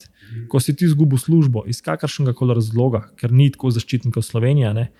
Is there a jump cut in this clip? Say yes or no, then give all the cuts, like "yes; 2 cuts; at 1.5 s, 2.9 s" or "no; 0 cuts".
no; 0 cuts